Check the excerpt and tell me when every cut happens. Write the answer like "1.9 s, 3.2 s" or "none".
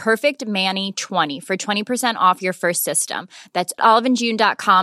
1.3 s